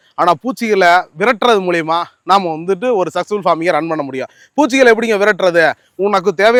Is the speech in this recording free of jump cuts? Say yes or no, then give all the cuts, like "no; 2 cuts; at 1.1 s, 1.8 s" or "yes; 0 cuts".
yes; 0 cuts